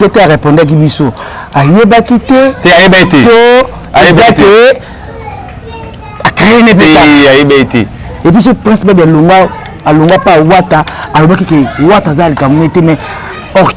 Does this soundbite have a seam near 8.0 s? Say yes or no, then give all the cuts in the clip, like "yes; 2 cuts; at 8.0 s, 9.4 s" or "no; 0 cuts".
yes; 1 cut; at 8.0 s